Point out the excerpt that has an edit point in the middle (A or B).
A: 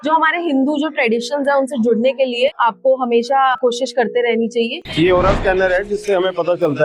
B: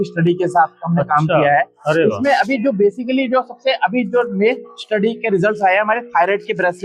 A